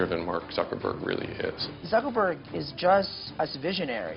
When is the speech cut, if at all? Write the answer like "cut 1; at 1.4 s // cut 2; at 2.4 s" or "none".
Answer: cut 1; at 1.7 s // cut 2; at 3.2 s